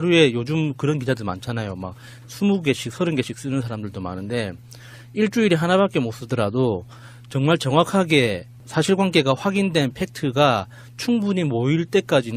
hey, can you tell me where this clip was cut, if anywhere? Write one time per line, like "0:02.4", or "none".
0:05.9